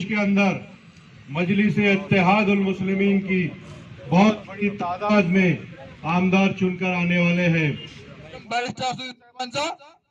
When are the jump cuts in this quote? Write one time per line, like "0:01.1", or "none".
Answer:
0:08.4